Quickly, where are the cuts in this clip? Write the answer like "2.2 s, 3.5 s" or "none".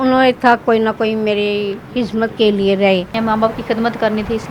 3.1 s